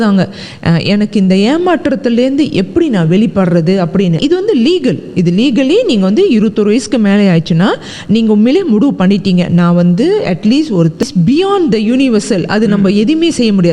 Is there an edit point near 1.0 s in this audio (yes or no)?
no